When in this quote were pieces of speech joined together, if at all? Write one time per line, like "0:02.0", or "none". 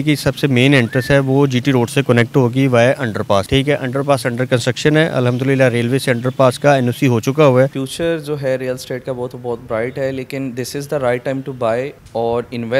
0:03.5
0:07.8